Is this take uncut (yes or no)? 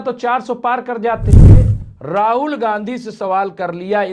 no